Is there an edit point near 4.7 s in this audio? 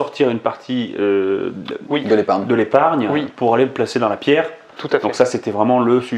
no; 0 cuts

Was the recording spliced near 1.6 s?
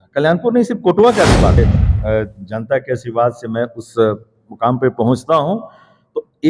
yes; 1 cut; at 1.6 s

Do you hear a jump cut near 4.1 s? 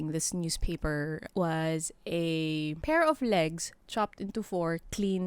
no; 2 cuts; at 1.3 s, 2.8 s

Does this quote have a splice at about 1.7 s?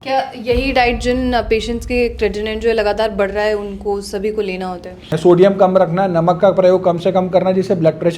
no; 1 cut; at 5.2 s

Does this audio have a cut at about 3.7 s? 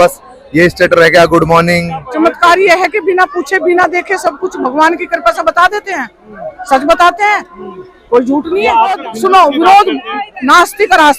no; 2 cuts; at 2.0 s, 9.0 s

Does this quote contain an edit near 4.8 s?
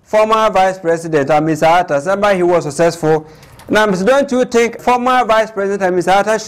yes; 1 cut; at 4.8 s

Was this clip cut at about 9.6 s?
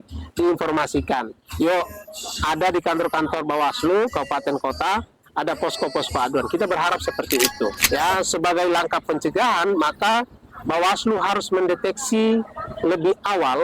no; 1 cut; at 7.8 s

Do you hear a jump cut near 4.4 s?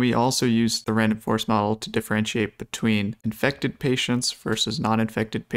no; 1 cut; at 3.2 s

